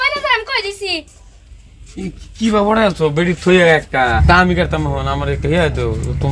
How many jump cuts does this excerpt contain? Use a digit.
1